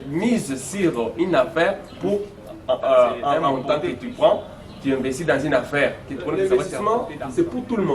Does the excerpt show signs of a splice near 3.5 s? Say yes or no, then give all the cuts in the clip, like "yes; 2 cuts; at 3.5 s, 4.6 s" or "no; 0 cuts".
yes; 2 cuts; at 3.5 s, 6.3 s